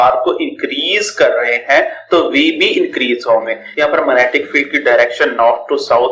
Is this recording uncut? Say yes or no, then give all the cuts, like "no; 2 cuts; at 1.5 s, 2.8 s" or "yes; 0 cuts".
no; 1 cut; at 3.6 s